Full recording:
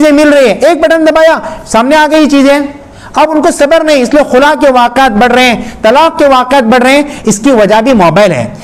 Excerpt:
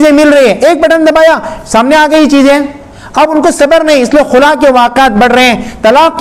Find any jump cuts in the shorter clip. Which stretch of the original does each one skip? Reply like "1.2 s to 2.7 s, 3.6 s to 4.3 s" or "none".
none